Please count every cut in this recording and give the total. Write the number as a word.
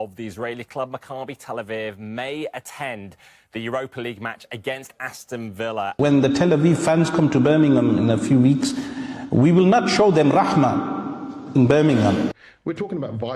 two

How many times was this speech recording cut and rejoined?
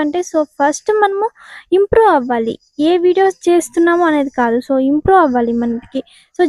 zero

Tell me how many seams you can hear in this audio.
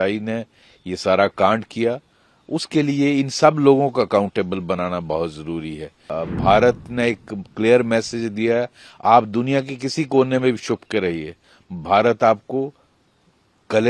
one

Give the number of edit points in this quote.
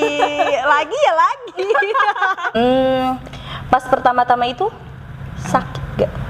one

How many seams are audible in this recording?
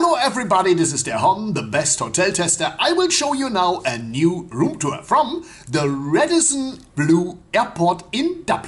zero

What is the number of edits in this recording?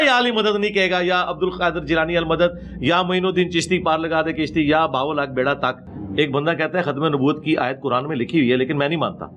one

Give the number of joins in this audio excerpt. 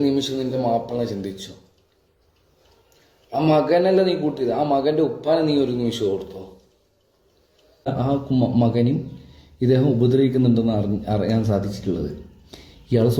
one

